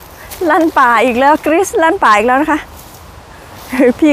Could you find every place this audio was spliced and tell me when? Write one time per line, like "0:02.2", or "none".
none